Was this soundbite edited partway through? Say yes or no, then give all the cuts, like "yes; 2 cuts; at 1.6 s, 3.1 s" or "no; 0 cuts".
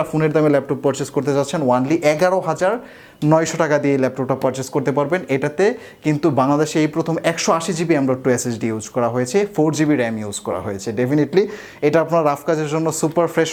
no; 0 cuts